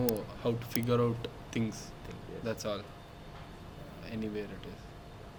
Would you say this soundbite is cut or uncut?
uncut